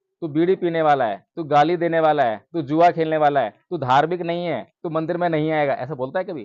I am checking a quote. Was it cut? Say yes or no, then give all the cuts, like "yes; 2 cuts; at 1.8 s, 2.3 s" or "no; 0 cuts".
no; 0 cuts